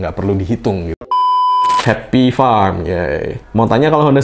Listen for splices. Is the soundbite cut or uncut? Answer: cut